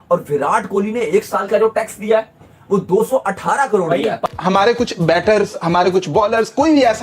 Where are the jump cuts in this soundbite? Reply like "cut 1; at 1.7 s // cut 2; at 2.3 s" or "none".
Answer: cut 1; at 4.3 s

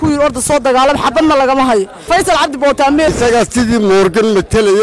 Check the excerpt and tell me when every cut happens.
cut 1; at 2.0 s // cut 2; at 3.1 s

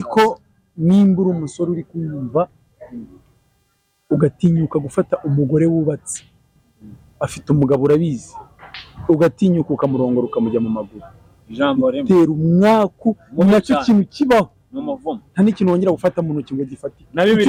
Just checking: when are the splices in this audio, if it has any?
none

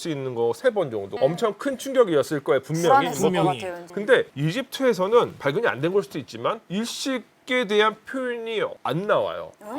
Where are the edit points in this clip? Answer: cut 1; at 1.1 s // cut 2; at 3.8 s

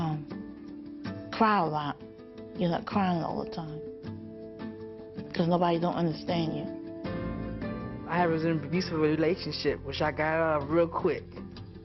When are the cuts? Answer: cut 1; at 2.4 s

